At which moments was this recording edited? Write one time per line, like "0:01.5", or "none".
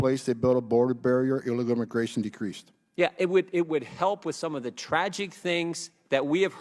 none